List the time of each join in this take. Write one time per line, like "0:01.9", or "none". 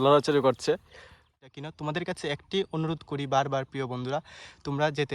0:01.3